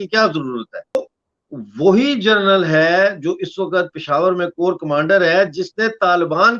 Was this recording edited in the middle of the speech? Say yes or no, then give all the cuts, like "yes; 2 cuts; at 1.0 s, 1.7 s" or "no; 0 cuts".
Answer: yes; 1 cut; at 1.0 s